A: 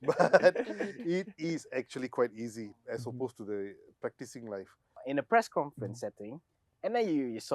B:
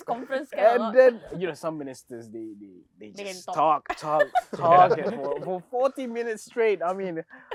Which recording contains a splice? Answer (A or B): A